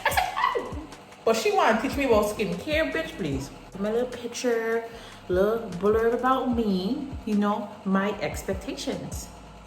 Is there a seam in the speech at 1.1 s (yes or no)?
no